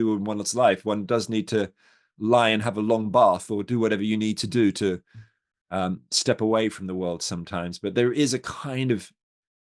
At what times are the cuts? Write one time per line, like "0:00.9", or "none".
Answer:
none

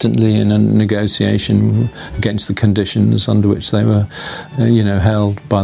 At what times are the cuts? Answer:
none

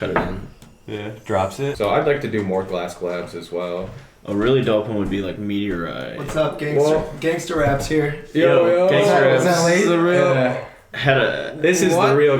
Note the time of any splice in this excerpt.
0:01.8

